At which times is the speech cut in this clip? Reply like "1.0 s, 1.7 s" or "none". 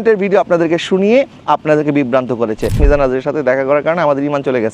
2.8 s